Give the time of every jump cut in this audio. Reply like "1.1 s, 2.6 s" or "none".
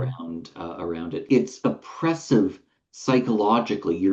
1.3 s